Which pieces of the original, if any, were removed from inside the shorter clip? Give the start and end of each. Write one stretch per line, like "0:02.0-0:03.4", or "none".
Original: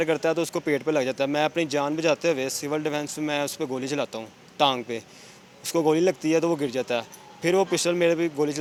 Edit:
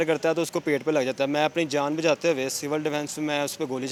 none